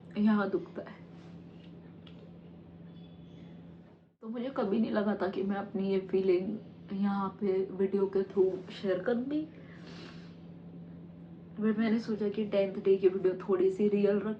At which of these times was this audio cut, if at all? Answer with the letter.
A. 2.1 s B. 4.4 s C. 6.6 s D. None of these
B